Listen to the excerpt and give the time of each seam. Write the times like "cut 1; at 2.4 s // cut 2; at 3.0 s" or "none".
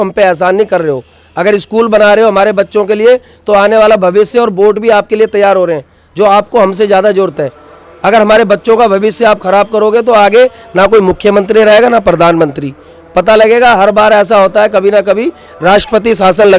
none